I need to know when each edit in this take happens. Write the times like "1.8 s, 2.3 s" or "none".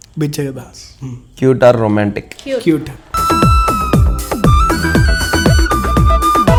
none